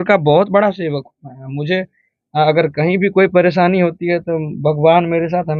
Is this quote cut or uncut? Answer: uncut